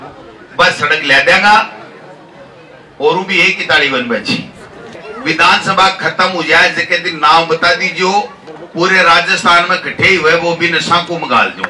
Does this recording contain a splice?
yes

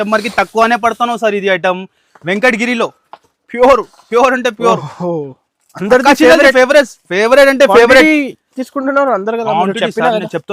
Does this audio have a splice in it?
no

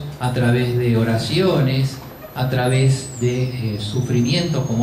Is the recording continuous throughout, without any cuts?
yes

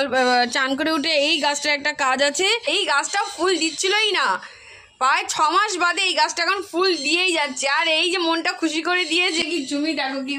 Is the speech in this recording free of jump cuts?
no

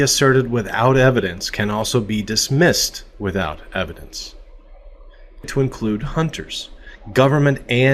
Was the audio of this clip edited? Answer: no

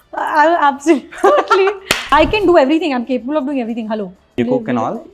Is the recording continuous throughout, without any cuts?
no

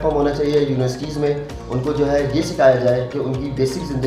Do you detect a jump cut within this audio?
yes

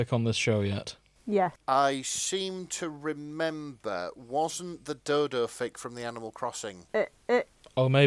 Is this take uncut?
yes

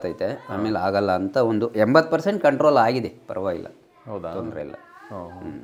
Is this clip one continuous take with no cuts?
yes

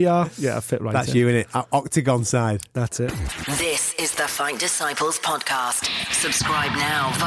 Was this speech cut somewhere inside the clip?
yes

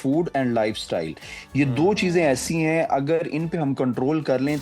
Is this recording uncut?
yes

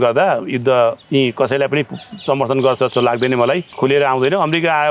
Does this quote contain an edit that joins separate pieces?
yes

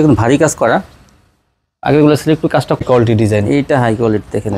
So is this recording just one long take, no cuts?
no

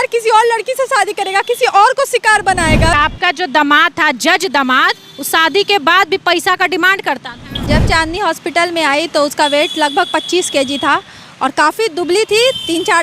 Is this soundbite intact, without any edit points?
no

